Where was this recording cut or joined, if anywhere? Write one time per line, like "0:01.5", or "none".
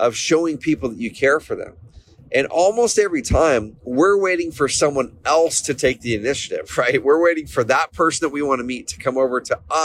none